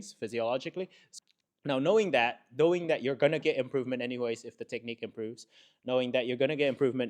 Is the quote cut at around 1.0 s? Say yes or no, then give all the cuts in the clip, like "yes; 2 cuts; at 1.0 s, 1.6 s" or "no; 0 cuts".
yes; 1 cut; at 1.0 s